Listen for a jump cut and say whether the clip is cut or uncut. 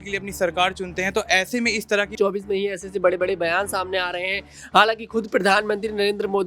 cut